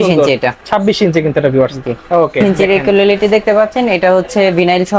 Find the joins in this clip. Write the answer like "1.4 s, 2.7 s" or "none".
2.4 s